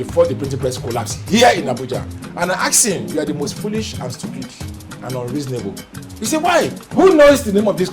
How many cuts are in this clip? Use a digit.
2